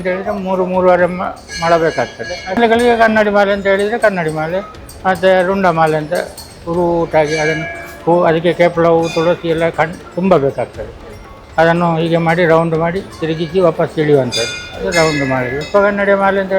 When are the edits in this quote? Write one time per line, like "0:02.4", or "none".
0:02.6
0:15.6